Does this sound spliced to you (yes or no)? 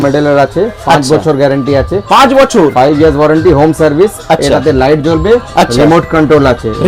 no